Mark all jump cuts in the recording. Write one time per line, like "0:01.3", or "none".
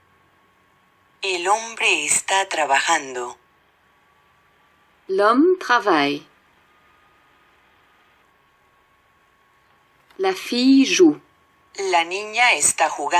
0:01.2